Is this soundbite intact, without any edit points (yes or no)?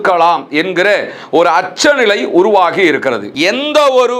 no